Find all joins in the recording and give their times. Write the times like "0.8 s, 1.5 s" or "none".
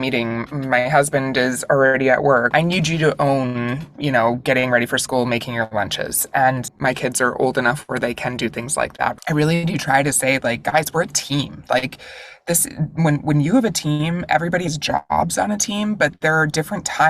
2.5 s, 6.7 s, 9.1 s